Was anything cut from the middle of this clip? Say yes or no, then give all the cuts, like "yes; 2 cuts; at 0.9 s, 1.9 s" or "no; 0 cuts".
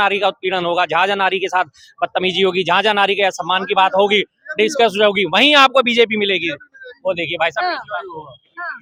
no; 0 cuts